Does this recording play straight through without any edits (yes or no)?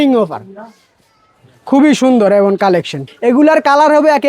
no